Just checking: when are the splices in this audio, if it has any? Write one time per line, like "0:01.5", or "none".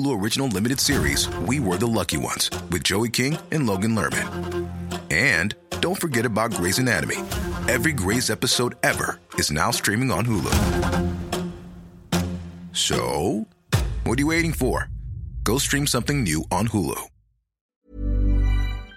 0:17.9